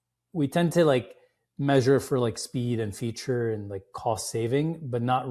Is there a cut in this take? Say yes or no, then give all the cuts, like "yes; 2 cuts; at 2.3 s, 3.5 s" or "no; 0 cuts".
no; 0 cuts